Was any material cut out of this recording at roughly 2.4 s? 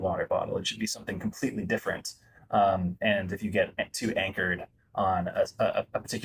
no; 0 cuts

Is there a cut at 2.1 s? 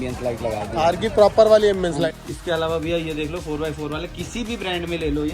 yes; 1 cut; at 2.1 s

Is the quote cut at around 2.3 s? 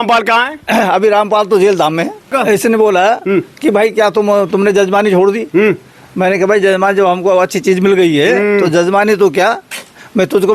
yes; 1 cut; at 2.3 s

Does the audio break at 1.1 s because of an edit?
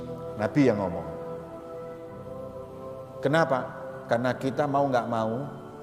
yes; 2 cuts; at 1.1 s, 3.2 s

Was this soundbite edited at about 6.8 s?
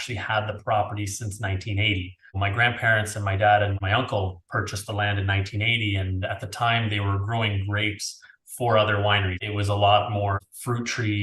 no; 4 cuts; at 2.4 s, 3.8 s, 9.4 s, 10.4 s

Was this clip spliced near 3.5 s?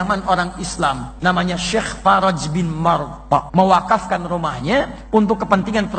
yes; 2 cuts; at 1.1 s, 3.5 s

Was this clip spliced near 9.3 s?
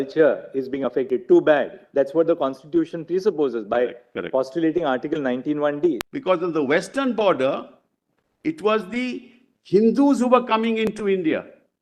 no; 1 cut; at 6.0 s

